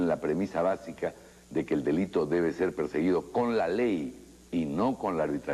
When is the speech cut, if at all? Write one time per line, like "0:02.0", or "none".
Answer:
none